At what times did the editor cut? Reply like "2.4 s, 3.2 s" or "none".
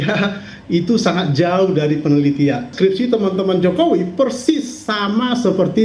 2.7 s

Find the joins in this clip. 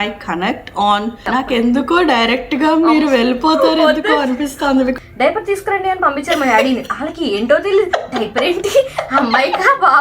1.2 s, 5.0 s

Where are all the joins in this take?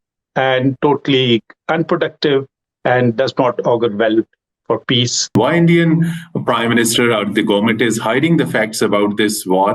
5.3 s

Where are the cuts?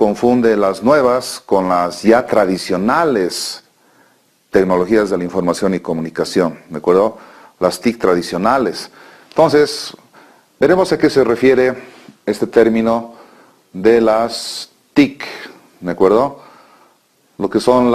1.2 s

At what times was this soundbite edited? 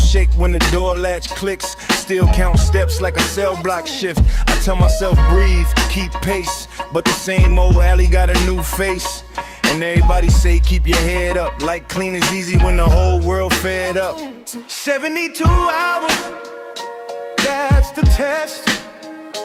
none

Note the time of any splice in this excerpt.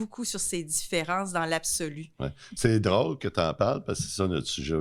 none

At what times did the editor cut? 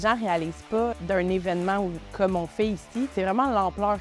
0.9 s, 2.0 s, 3.1 s

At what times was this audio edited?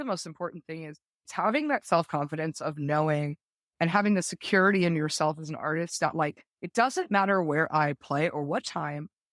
1.3 s

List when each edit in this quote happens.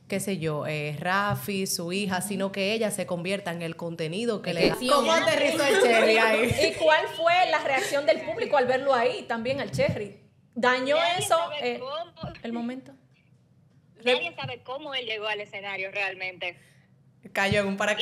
4.8 s

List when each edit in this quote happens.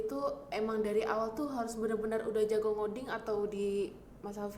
none

